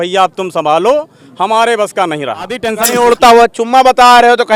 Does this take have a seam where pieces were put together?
yes; 1 cut; at 2.7 s

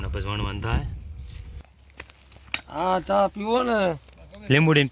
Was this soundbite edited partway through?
yes; 1 cut; at 1.4 s

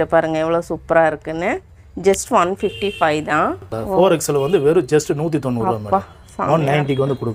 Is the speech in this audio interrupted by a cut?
yes; 1 cut; at 3.6 s

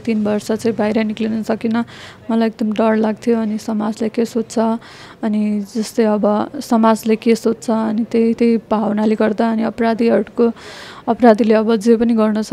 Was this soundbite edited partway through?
no; 0 cuts

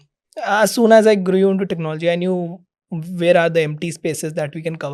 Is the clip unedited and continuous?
yes; 0 cuts

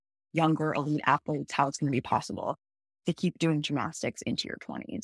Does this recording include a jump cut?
no; 0 cuts

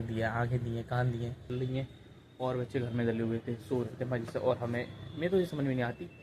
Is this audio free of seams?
no; 1 cut; at 1.5 s

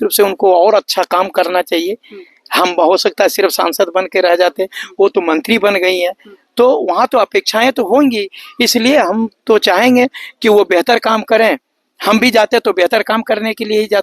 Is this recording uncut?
yes; 0 cuts

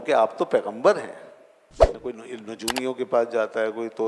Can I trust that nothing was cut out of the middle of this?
no; 1 cut; at 2.1 s

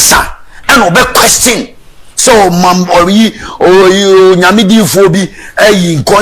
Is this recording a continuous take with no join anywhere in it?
yes; 0 cuts

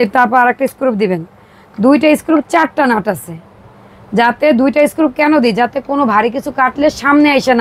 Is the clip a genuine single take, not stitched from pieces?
yes; 0 cuts

